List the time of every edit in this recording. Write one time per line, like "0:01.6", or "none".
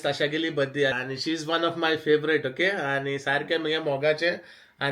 0:01.0